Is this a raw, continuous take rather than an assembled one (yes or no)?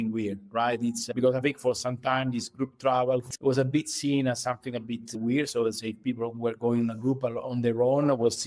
no